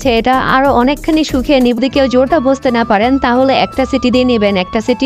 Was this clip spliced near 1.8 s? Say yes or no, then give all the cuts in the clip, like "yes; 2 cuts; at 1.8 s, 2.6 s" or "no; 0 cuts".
yes; 1 cut; at 1.8 s